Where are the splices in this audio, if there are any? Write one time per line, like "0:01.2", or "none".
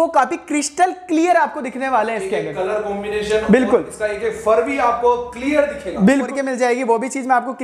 0:06.3